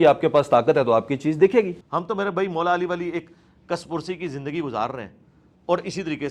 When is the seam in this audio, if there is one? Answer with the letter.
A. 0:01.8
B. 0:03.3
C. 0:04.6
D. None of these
A